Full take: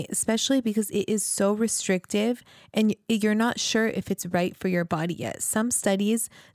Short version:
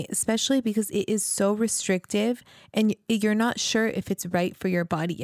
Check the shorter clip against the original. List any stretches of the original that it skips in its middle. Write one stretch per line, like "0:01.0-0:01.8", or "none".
none